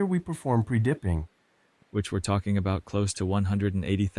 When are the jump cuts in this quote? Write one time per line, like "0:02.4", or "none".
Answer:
0:01.4